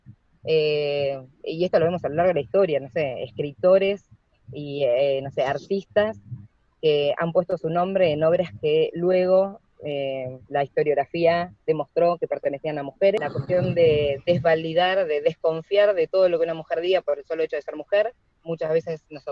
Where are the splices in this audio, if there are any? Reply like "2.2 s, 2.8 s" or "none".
13.2 s, 18.3 s

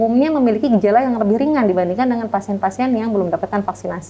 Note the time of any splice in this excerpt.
none

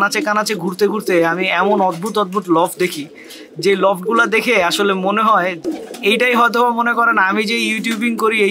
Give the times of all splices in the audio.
5.6 s

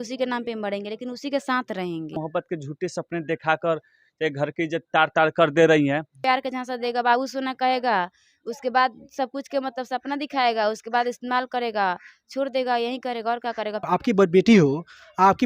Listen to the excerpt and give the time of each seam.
2.2 s, 6.2 s, 13.8 s

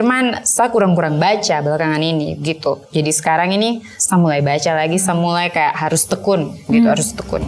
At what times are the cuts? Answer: 3.9 s

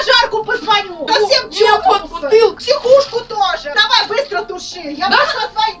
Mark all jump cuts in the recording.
1.0 s, 2.6 s, 3.8 s

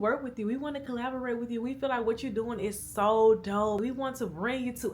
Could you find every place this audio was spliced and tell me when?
3.8 s

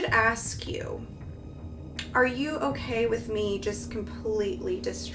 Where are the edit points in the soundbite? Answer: none

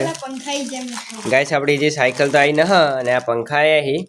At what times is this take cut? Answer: none

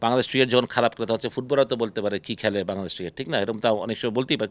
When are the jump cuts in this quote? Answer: none

